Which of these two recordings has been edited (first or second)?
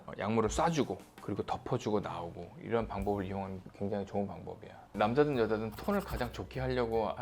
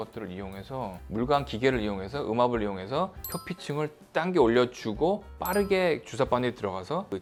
first